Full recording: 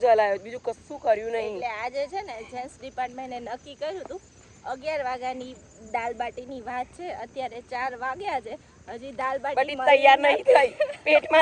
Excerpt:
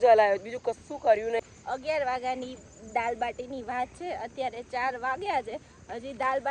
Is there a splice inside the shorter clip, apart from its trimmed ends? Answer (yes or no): yes